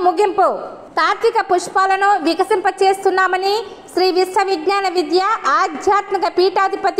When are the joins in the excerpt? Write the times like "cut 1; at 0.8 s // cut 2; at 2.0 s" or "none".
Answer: none